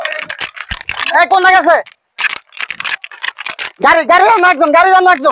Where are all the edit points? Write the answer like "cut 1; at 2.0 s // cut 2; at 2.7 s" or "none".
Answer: none